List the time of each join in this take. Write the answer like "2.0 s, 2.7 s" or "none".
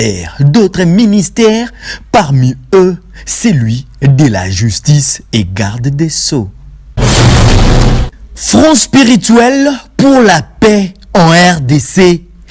7.0 s, 8.3 s